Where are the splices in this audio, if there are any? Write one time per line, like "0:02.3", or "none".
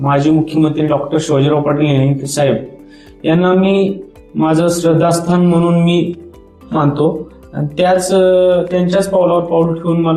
none